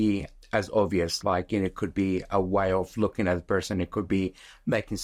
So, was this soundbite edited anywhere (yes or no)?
no